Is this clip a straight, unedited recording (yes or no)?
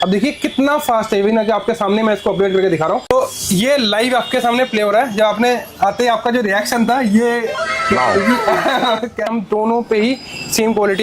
no